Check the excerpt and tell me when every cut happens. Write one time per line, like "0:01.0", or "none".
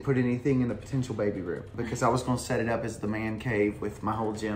none